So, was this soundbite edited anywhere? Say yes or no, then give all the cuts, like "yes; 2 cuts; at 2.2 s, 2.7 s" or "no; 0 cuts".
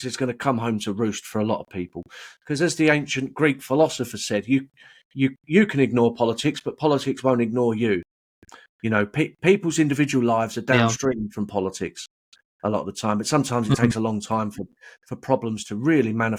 no; 0 cuts